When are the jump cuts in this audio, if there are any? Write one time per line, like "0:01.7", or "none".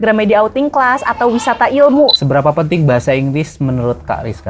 0:02.1